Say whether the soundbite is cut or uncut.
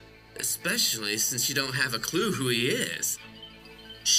uncut